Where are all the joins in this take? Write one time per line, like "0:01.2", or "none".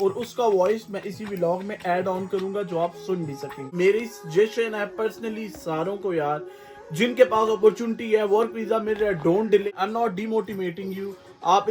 0:03.5
0:09.6